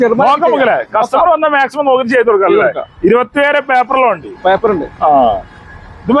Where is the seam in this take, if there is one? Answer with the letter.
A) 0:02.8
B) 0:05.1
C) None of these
C